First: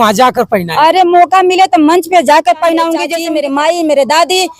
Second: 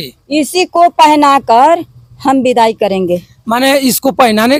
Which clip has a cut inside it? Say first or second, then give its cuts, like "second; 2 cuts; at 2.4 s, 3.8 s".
first; 1 cut; at 3.1 s